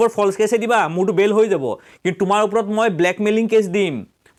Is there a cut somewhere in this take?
no; 0 cuts

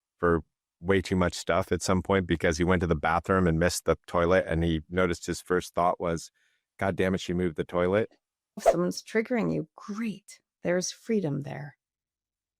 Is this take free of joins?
no; 1 cut; at 8.7 s

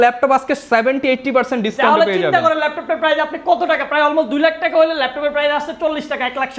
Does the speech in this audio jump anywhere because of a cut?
no; 0 cuts

